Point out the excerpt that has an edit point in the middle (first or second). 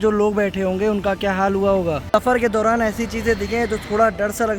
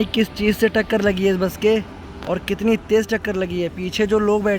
first